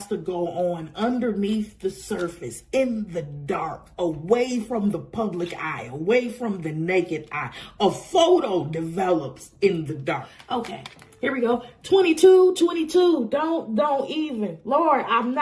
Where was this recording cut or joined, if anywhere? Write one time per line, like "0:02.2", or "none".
0:10.3